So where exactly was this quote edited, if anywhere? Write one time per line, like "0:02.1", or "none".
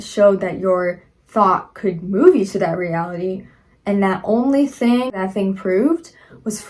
0:05.1